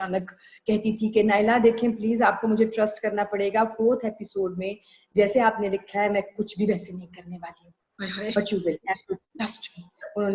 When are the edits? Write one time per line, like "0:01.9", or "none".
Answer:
none